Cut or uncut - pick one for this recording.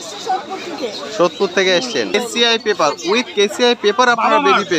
cut